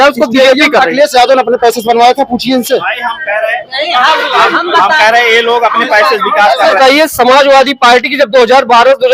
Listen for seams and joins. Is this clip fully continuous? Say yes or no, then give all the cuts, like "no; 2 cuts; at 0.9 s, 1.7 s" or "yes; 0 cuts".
no; 1 cut; at 6.8 s